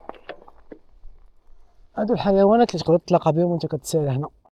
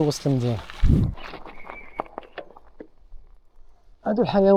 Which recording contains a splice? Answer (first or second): second